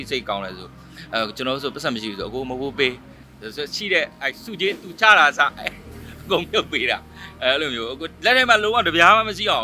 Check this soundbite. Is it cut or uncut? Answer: uncut